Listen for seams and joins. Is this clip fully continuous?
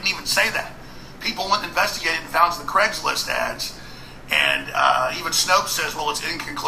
yes; 0 cuts

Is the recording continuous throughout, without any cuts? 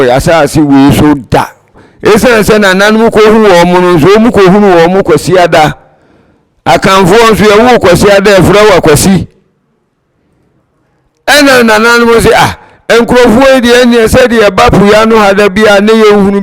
no; 1 cut; at 1.8 s

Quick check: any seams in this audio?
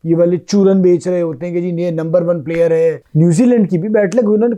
yes; 1 cut; at 3.0 s

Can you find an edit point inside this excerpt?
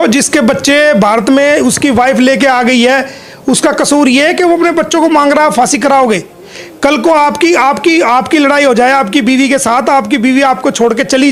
no; 0 cuts

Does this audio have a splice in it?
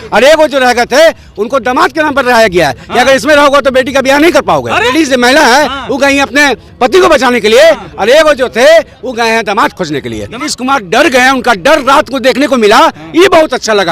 yes; 2 cuts; at 4.9 s, 10.5 s

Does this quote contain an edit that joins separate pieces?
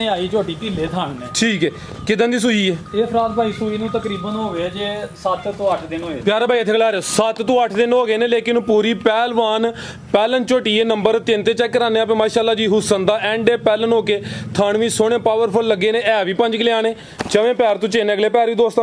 no; 0 cuts

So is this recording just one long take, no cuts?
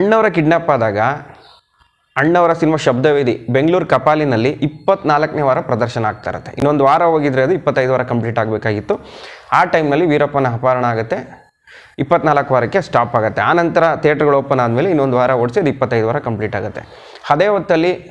yes; 0 cuts

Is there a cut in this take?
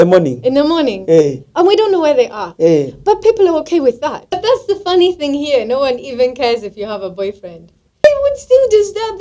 yes; 2 cuts; at 4.3 s, 8.0 s

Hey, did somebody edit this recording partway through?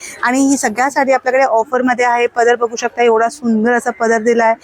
no; 0 cuts

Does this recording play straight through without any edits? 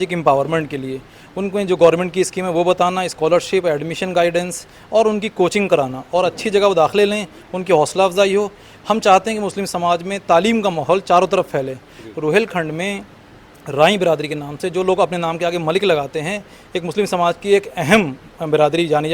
yes; 0 cuts

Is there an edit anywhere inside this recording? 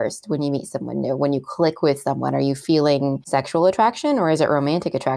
yes; 1 cut; at 3.2 s

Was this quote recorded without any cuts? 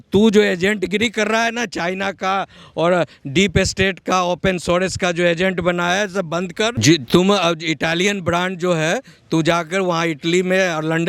yes; 0 cuts

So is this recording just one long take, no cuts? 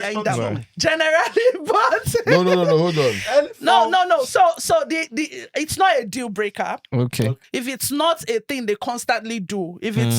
no; 1 cut; at 7.4 s

